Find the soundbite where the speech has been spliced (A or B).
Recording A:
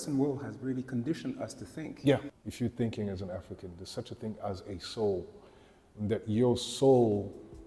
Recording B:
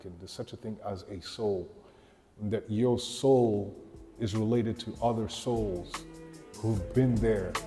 A